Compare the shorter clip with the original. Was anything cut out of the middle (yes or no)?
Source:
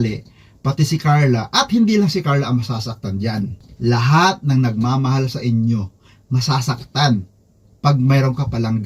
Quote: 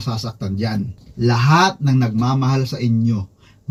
no